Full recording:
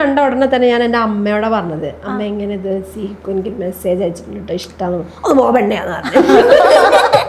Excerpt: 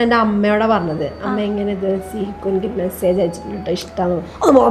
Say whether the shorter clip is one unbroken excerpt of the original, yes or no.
yes